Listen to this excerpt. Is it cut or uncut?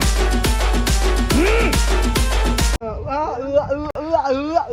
cut